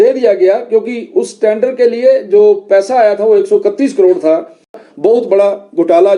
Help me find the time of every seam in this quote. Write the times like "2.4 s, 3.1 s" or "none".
4.7 s